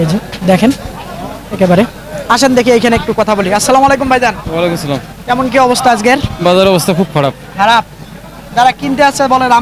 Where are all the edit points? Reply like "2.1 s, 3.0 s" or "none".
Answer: none